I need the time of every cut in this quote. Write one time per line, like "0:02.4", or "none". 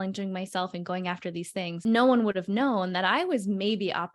0:01.8

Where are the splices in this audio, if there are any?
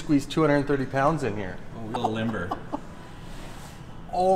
0:01.9

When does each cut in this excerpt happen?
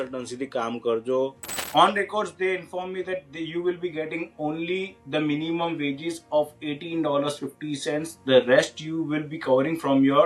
0:01.5

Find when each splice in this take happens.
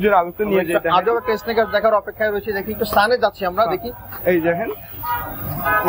none

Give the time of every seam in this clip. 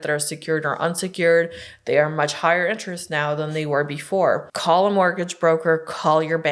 0:04.5

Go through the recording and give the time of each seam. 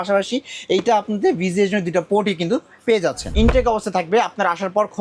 0:03.2

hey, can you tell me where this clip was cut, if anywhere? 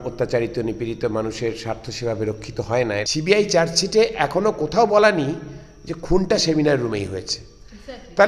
0:03.1

